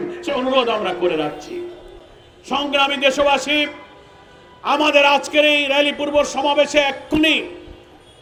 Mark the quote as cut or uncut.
uncut